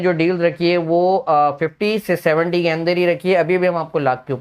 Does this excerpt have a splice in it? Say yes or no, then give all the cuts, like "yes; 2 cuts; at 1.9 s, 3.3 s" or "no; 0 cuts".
no; 0 cuts